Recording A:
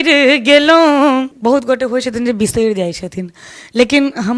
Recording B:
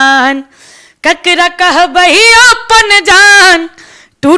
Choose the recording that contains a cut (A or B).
A